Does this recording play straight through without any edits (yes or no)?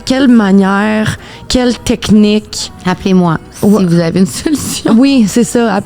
yes